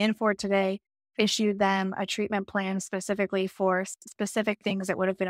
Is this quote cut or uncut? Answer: uncut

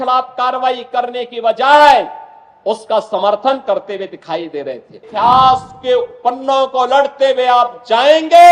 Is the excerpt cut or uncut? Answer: cut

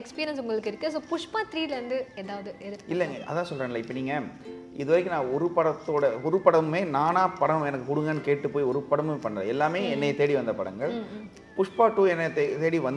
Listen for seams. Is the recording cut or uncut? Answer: uncut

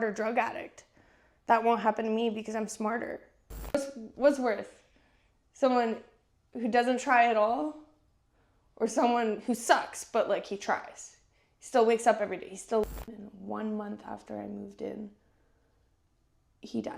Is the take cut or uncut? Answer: cut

